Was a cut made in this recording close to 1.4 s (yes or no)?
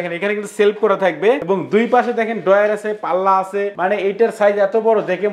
no